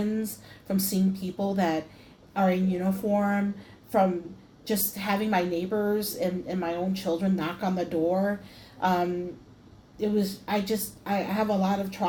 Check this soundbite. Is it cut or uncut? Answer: uncut